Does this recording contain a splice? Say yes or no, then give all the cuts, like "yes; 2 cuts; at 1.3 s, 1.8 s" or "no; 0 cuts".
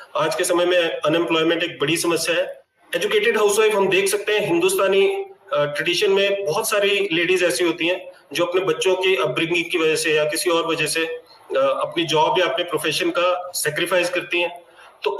yes; 1 cut; at 2.6 s